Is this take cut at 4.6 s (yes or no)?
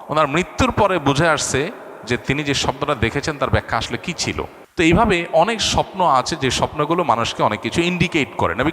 yes